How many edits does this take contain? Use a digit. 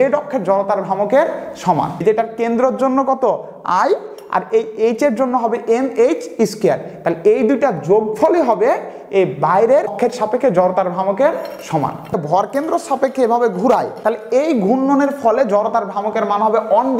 4